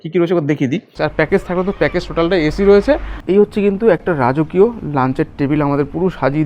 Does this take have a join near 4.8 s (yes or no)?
no